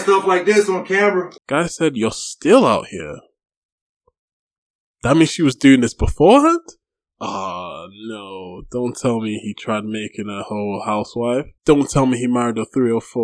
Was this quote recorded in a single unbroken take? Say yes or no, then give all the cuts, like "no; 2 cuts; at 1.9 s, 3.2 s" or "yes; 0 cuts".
no; 1 cut; at 1.4 s